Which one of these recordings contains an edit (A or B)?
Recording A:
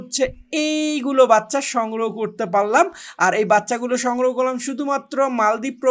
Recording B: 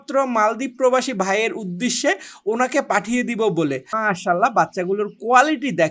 B